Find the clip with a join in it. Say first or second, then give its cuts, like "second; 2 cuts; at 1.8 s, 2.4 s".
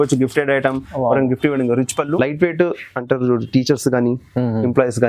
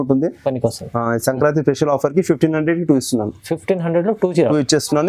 first; 1 cut; at 2.2 s